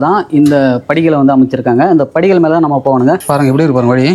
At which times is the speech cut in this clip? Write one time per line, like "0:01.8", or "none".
0:03.2